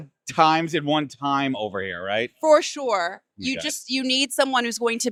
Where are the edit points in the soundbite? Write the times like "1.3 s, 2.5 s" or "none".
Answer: none